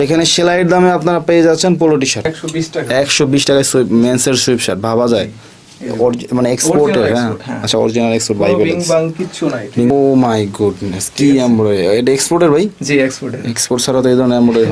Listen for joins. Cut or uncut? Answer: cut